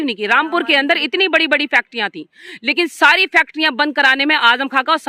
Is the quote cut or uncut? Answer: uncut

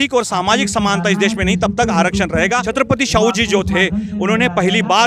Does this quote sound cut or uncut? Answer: cut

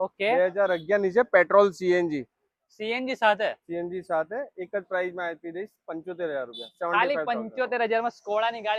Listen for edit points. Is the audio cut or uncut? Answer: uncut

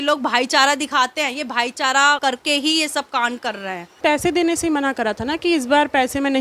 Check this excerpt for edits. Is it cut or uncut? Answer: cut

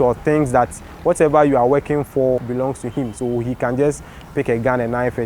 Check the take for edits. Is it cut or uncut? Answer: cut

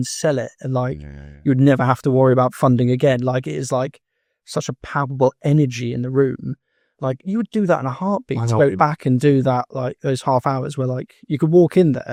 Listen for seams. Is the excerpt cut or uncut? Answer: uncut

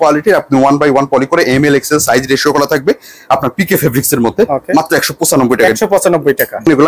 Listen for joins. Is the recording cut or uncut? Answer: uncut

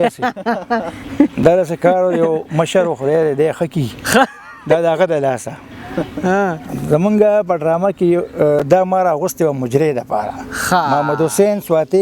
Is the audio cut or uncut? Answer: uncut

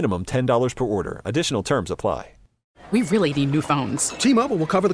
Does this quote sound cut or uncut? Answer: cut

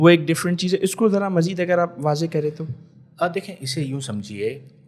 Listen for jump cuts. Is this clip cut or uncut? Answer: uncut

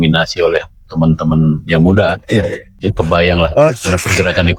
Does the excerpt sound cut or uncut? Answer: uncut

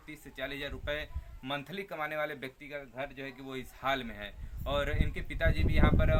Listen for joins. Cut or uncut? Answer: uncut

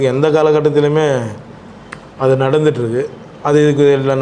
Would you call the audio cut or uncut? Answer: uncut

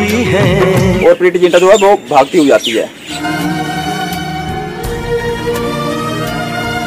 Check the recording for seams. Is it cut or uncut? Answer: cut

